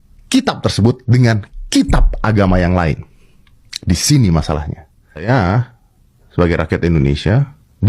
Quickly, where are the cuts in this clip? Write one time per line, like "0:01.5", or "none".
0:05.2